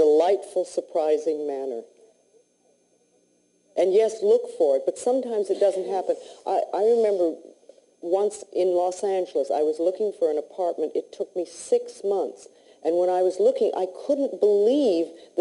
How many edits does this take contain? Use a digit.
0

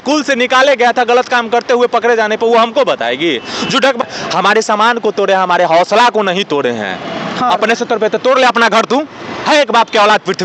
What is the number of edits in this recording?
2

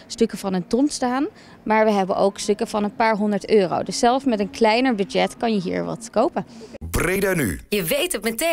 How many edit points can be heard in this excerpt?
1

